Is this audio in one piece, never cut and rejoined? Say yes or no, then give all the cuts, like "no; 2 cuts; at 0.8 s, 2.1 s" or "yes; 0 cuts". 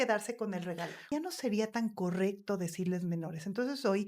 no; 1 cut; at 1.0 s